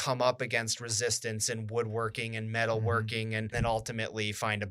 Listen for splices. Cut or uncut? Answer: cut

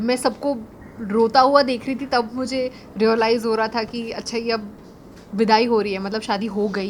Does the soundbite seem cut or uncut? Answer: uncut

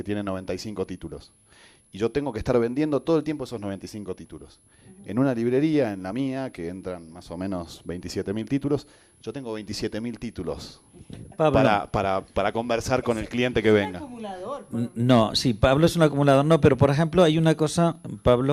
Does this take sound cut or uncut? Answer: cut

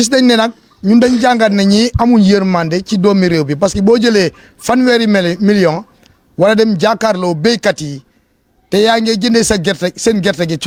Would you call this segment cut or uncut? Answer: uncut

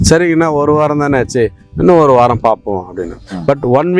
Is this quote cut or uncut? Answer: uncut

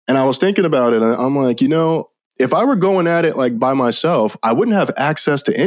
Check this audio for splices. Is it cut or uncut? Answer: cut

